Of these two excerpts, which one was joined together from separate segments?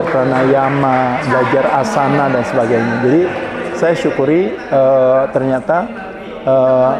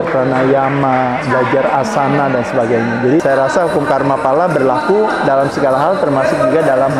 second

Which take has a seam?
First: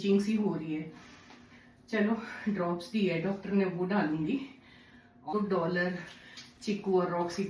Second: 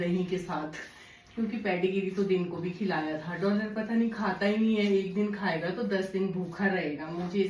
first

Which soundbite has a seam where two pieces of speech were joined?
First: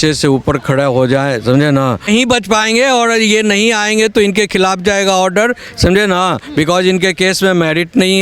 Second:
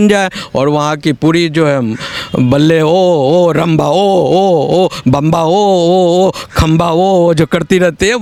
first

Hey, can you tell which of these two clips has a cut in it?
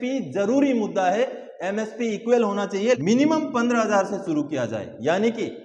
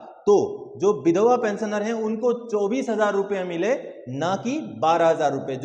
first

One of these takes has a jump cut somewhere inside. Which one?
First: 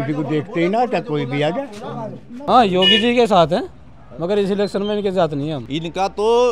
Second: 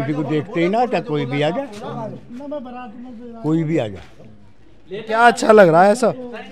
first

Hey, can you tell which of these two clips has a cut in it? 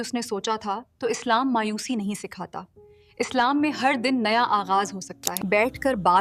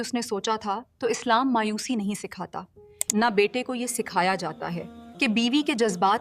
second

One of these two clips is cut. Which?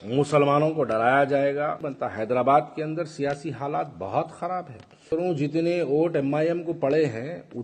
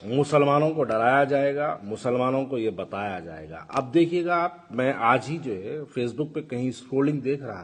first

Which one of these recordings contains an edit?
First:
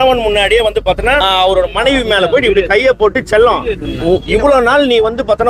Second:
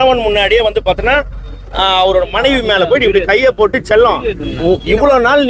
first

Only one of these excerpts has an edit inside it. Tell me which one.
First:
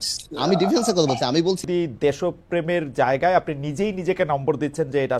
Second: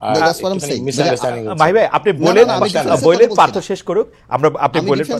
first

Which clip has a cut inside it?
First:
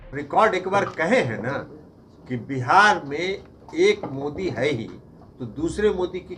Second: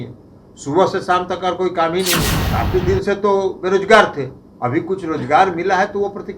second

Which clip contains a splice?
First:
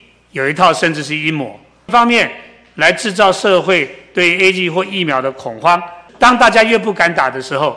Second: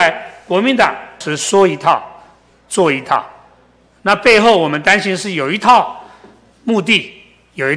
first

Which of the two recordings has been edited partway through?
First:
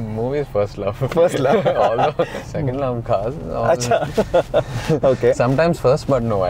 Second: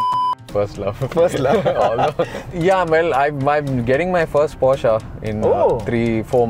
second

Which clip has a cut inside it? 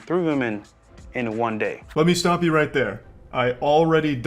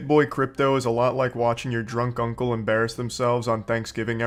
first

